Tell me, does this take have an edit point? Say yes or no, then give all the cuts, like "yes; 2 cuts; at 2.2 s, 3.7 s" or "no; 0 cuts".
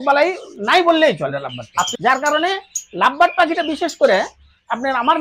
yes; 1 cut; at 1.9 s